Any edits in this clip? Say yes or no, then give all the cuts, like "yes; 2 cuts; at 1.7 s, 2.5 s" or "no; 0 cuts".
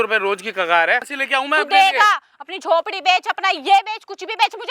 yes; 1 cut; at 1.2 s